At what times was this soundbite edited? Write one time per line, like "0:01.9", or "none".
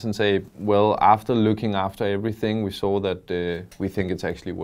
none

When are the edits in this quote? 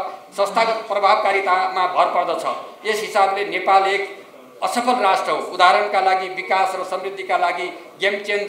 none

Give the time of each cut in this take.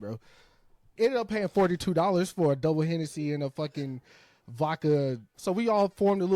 0:00.9
0:05.3

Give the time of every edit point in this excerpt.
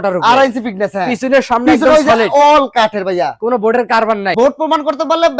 0:04.3

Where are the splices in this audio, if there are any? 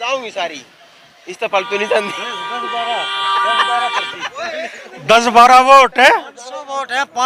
none

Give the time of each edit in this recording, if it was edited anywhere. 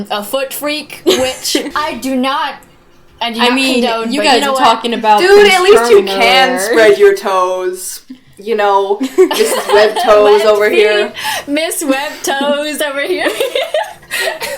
0:01.7

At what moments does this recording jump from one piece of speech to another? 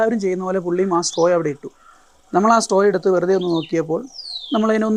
none

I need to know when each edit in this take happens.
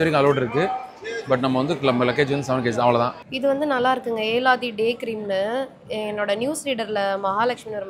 0:03.2

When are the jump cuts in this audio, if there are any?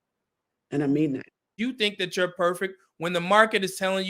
0:01.5

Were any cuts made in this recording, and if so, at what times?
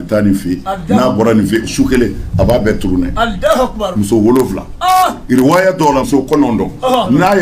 0:06.1

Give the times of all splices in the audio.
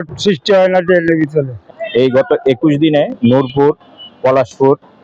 0:01.6

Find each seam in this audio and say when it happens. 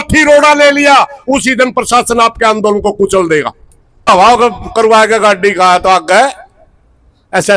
0:04.1

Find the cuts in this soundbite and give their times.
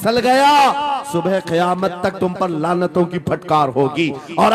none

